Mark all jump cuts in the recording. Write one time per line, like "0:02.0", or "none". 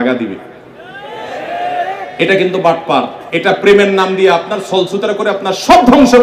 0:03.2

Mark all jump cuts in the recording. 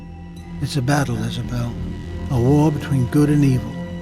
0:02.3

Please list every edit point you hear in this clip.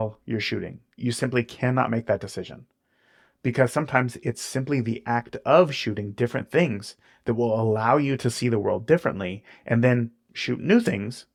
none

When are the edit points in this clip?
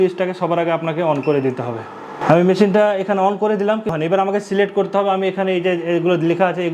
0:02.2
0:03.9

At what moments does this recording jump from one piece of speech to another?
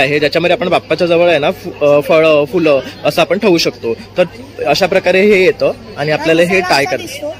none

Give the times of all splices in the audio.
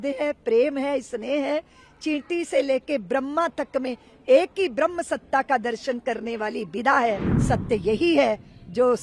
0:07.3

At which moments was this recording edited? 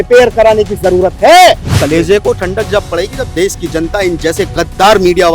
0:01.7

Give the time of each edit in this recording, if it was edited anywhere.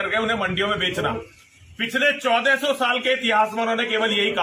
none

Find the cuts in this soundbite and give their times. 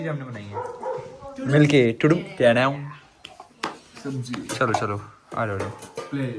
none

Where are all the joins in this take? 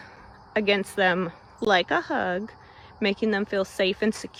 none

